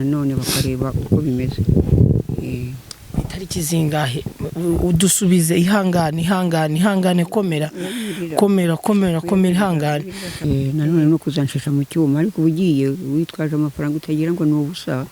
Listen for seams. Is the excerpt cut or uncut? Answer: cut